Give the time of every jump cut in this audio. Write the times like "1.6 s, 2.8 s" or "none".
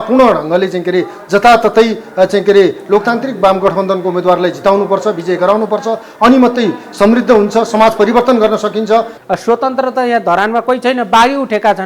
9.1 s